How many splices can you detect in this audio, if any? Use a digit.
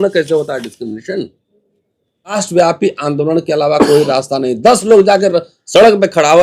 1